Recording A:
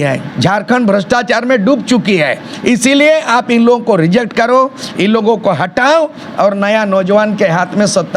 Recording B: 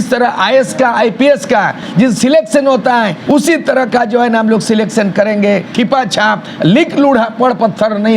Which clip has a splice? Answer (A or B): B